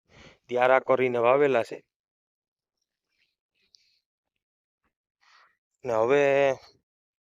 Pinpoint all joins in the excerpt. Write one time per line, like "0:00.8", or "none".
none